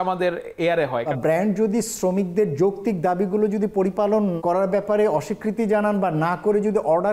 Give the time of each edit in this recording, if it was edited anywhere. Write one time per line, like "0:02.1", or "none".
0:01.1
0:04.4

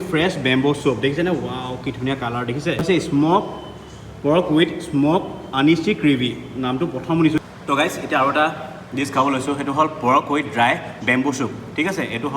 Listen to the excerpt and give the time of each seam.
0:02.8
0:07.4

